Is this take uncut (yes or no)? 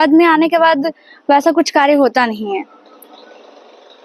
yes